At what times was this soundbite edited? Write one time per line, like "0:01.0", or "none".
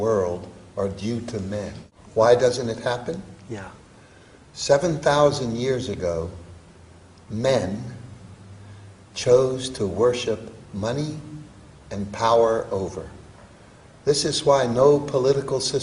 0:12.5